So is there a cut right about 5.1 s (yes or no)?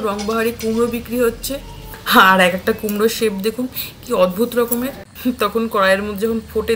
yes